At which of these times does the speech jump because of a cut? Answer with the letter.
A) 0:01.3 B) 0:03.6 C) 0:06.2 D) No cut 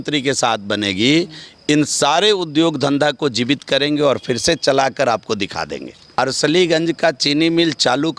C